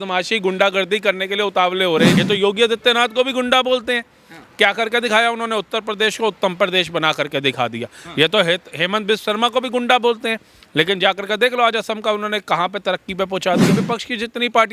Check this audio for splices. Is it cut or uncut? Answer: cut